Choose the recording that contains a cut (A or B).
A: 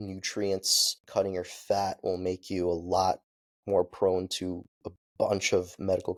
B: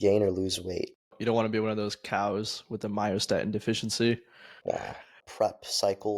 B